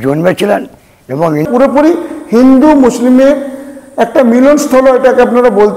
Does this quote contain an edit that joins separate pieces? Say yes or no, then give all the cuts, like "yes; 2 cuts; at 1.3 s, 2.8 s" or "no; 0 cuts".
yes; 1 cut; at 1.5 s